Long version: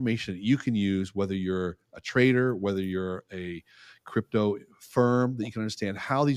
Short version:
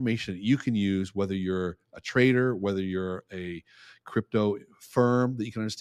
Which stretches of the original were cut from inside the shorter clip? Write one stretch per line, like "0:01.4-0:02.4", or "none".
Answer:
none